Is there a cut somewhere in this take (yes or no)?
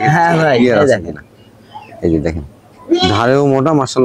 no